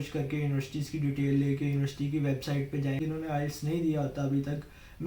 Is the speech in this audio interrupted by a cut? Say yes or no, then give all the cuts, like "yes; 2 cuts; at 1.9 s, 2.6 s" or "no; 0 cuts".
yes; 1 cut; at 3.0 s